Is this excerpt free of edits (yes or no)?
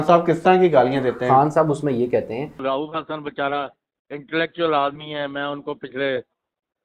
no